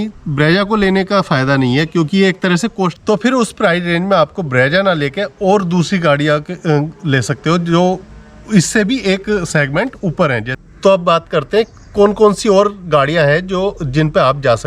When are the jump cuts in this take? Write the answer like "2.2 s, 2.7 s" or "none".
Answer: 3.0 s, 10.5 s

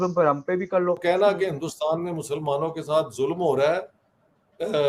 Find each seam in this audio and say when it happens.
1.0 s

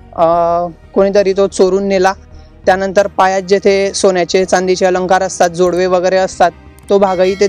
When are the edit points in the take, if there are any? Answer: none

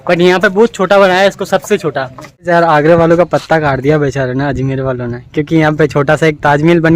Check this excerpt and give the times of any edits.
2.5 s

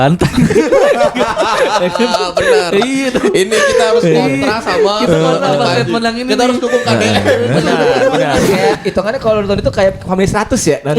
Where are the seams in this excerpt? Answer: 8.4 s

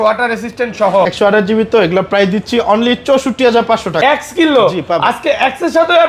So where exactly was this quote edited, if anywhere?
1.1 s, 3.9 s

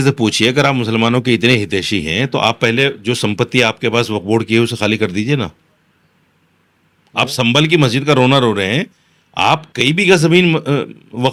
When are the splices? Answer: none

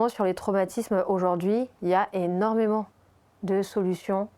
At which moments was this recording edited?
none

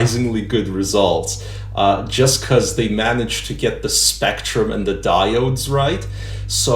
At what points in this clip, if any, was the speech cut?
none

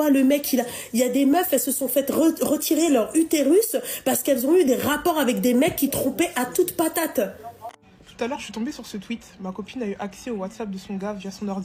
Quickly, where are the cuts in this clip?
7.8 s

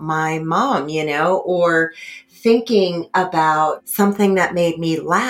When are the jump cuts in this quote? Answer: 3.8 s

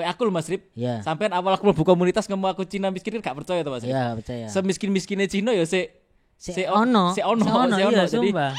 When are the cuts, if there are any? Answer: none

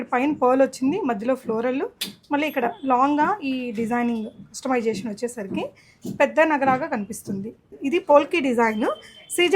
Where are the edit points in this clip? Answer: 7.7 s

